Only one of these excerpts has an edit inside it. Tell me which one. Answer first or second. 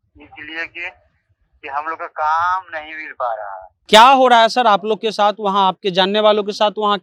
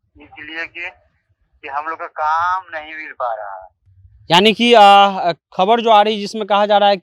first